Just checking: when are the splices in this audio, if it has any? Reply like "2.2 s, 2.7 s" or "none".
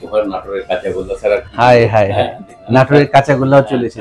none